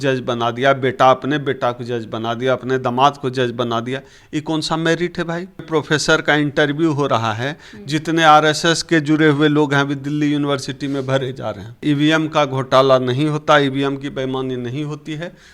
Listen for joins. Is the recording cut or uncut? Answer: cut